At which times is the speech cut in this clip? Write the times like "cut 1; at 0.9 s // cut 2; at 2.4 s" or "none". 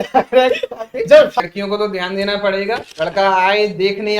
cut 1; at 1.4 s